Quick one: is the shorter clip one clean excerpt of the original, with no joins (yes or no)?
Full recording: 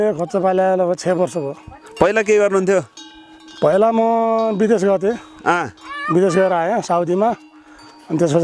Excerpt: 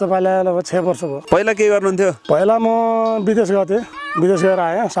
no